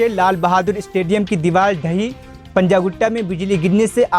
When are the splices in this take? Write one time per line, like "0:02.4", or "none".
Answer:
none